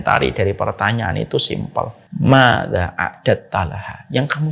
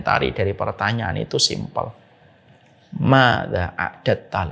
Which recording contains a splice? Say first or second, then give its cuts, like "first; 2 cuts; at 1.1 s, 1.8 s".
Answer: first; 1 cut; at 2.0 s